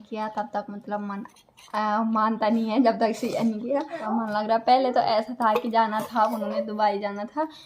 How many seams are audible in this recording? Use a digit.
1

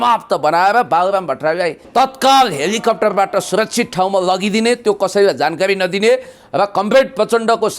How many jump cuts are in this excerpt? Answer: 1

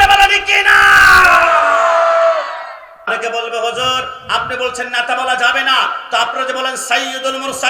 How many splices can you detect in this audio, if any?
1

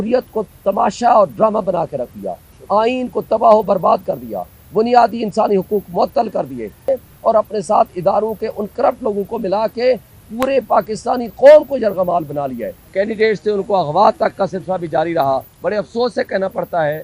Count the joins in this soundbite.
3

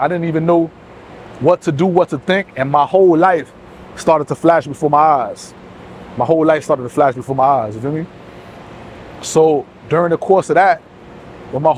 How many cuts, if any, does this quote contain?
0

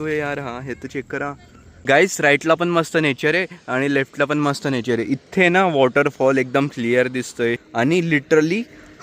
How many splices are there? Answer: 2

